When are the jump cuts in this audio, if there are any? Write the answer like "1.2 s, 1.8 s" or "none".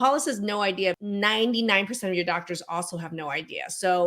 1.0 s